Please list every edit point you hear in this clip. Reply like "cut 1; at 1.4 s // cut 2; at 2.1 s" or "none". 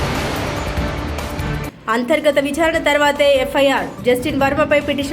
cut 1; at 1.5 s